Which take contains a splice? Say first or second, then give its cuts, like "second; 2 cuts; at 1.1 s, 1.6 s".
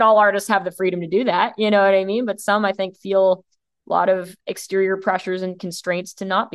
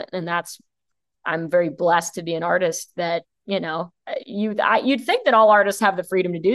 second; 1 cut; at 4.0 s